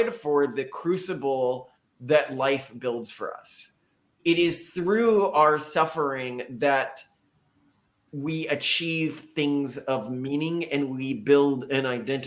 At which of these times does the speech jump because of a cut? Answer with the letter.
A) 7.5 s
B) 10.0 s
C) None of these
C